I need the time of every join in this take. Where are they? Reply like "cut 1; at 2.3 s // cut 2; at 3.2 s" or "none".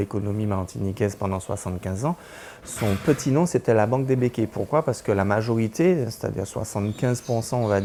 none